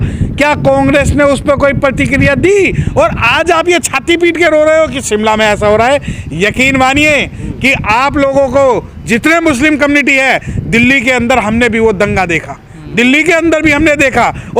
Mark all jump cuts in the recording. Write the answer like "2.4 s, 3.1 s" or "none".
none